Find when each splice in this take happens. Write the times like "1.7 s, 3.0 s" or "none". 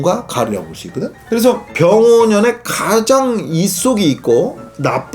1.7 s